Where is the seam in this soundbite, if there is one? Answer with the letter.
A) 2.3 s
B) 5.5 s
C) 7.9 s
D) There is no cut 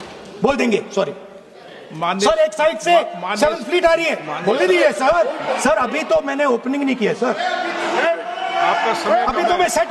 B